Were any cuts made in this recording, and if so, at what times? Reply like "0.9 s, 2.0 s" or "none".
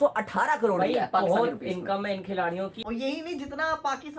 2.8 s